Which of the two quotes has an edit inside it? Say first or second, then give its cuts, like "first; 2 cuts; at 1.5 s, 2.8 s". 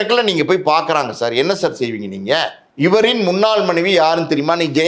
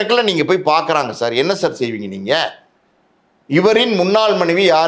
first; 1 cut; at 2.6 s